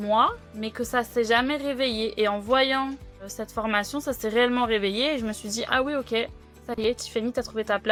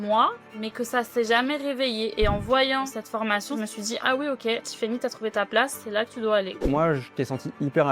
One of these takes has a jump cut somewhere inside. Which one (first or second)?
second